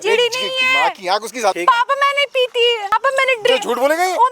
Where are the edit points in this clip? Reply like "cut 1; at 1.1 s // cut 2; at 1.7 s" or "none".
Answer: cut 1; at 1.6 s // cut 2; at 2.9 s